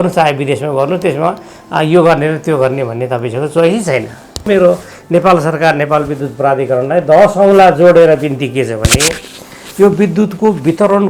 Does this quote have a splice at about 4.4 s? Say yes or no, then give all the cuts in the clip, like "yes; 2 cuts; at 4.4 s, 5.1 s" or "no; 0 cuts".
yes; 1 cut; at 4.4 s